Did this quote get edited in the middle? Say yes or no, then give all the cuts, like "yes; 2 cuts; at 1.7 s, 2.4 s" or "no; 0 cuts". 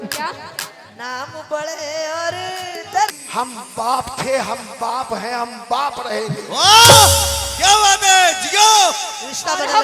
yes; 1 cut; at 3.2 s